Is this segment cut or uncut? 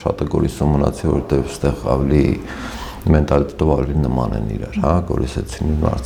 uncut